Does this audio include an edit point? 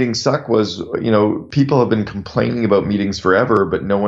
yes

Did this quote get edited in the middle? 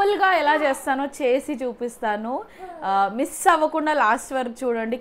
no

